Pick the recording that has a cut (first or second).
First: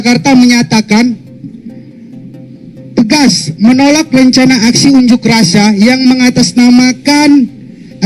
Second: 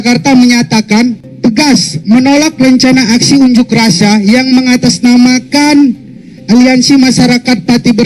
second